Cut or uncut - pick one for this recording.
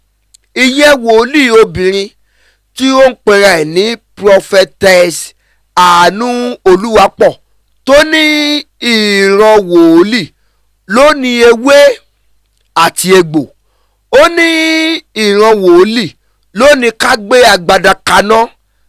uncut